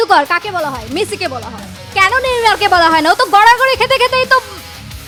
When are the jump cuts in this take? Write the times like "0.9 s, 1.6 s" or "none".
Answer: none